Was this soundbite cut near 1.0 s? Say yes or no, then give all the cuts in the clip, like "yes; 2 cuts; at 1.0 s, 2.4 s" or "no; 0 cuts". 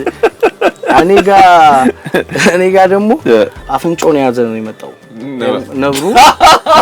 yes; 2 cuts; at 1.0 s, 3.6 s